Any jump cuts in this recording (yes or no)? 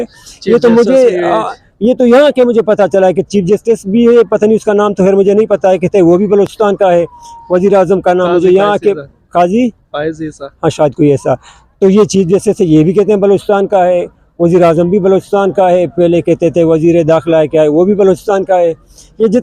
no